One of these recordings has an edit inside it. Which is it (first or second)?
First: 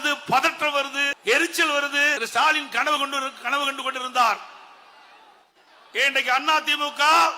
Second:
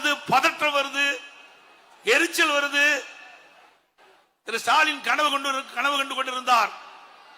first